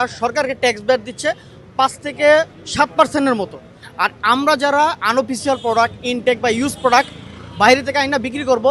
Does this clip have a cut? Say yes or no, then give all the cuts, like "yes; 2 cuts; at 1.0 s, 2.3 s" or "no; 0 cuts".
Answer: no; 0 cuts